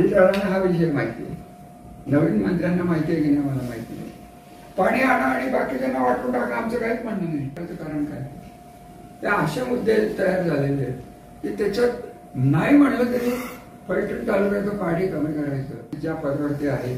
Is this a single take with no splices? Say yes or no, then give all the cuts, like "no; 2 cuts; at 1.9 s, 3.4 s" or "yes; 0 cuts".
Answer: no; 2 cuts; at 7.7 s, 16.0 s